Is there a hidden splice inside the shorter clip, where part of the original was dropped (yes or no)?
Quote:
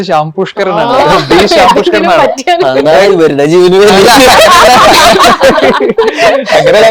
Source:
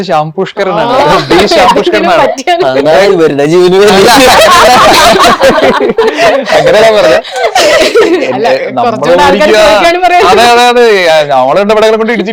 no